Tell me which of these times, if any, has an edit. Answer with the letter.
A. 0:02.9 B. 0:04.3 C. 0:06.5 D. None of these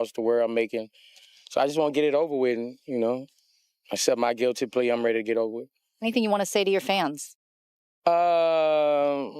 C